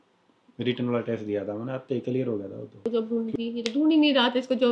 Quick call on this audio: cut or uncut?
cut